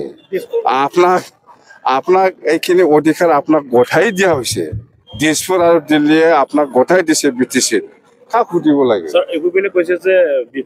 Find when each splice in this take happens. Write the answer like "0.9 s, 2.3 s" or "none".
none